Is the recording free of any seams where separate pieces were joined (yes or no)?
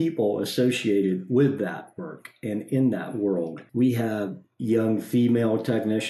no